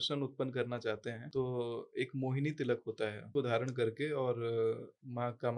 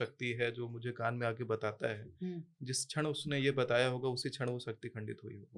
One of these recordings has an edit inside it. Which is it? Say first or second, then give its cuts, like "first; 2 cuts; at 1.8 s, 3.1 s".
first; 2 cuts; at 1.2 s, 3.3 s